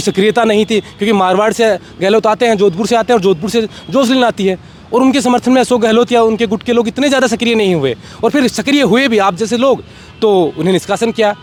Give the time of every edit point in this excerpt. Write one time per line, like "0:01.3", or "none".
none